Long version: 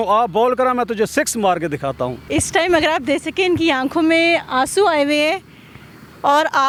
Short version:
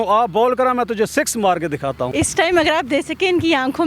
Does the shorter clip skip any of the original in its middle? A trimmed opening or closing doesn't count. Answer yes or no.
yes